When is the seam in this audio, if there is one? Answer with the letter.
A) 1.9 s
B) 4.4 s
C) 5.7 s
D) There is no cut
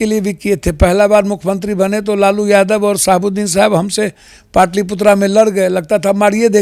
D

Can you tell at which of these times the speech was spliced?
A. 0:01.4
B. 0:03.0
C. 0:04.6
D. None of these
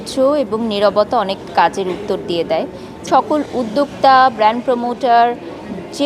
B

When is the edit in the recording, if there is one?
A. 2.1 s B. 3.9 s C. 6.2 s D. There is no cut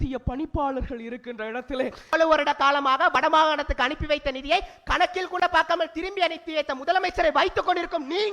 A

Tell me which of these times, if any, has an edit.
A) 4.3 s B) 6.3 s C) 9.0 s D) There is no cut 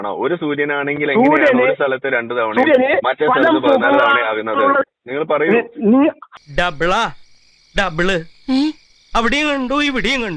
B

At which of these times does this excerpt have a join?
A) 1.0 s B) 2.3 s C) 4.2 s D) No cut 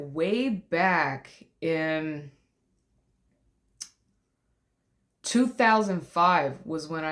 D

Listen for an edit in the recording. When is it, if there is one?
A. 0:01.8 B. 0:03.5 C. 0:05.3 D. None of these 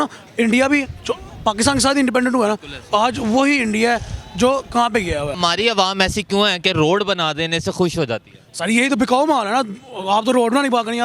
C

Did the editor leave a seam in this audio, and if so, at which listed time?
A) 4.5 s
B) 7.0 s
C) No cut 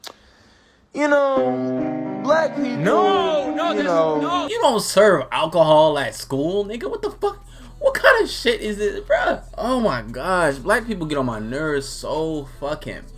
A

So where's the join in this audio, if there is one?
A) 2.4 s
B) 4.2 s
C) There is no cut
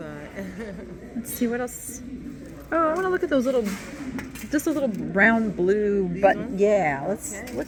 C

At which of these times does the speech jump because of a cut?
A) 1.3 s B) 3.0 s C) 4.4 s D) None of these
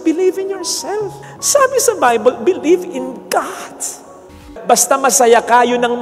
C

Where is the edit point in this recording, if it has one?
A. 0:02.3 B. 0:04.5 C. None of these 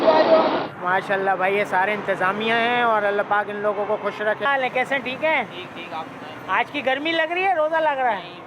B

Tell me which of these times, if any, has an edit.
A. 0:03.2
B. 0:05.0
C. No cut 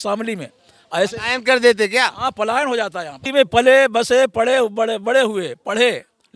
A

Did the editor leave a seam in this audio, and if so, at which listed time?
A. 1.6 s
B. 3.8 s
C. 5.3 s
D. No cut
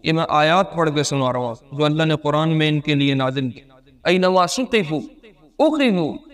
D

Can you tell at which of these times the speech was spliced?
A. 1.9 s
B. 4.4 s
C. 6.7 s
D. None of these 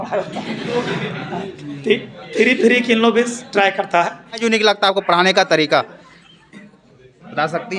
B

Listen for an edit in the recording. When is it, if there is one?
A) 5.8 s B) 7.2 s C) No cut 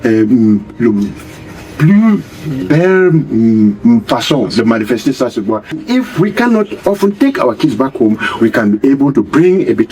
A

